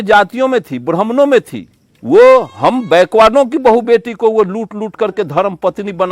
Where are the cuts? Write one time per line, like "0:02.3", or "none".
0:01.9